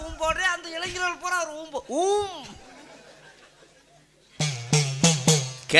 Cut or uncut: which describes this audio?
uncut